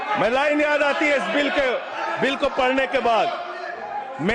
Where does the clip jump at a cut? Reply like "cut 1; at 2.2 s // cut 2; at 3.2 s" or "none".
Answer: none